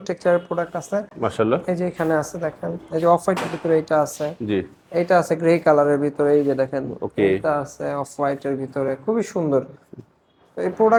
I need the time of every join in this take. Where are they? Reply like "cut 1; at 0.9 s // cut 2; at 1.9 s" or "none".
none